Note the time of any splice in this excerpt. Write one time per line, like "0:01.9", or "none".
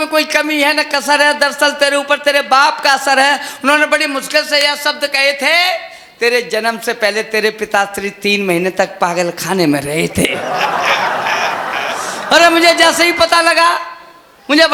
none